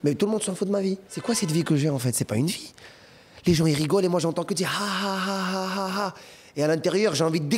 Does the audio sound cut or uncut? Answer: cut